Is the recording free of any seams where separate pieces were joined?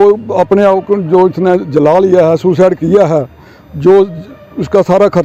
yes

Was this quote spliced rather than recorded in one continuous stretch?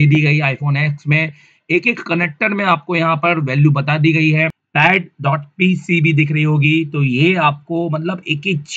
yes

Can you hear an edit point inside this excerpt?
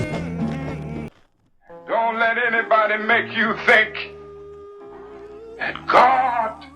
yes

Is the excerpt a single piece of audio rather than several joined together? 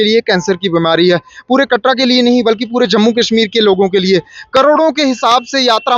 yes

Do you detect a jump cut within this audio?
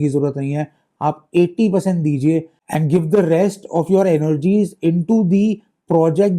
no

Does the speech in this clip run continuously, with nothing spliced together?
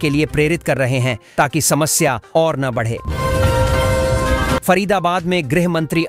no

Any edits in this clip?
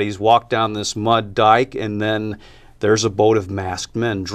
no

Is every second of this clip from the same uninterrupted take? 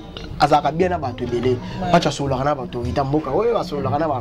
yes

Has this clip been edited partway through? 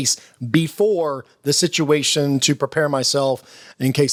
no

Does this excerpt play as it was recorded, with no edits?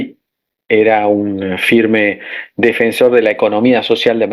yes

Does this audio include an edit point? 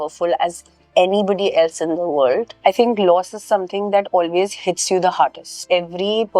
yes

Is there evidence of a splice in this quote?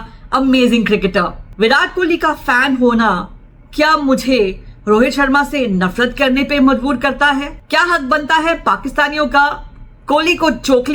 yes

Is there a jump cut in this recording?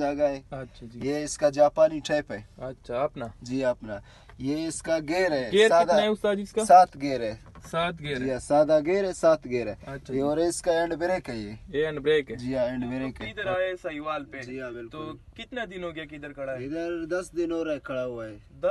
yes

